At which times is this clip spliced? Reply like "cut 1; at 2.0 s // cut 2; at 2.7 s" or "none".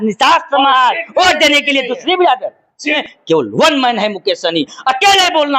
cut 1; at 3.0 s

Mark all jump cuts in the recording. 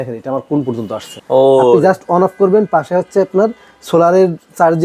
cut 1; at 1.1 s

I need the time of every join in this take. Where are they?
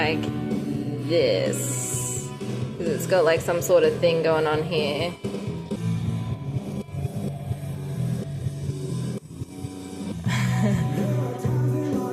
none

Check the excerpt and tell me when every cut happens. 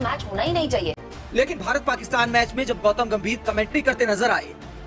cut 1; at 1.0 s

